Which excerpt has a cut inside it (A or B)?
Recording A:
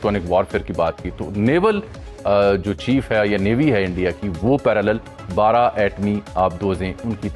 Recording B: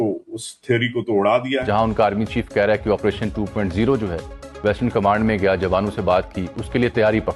B